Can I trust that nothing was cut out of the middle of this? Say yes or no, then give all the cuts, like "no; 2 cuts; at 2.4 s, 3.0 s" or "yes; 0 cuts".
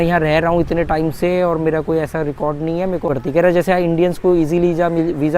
no; 1 cut; at 3.1 s